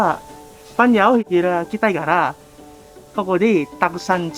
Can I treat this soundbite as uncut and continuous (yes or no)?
no